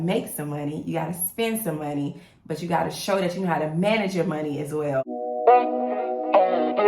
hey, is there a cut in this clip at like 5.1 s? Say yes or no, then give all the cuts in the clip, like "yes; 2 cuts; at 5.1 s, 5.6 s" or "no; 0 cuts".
yes; 1 cut; at 5.1 s